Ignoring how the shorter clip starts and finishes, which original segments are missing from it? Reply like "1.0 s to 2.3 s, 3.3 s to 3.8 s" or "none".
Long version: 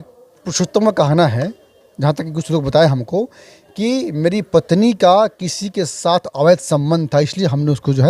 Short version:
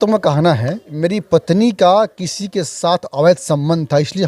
1.6 s to 4.1 s